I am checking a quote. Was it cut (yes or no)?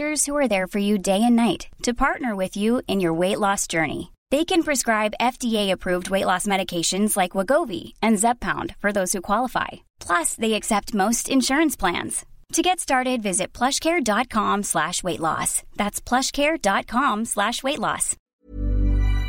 yes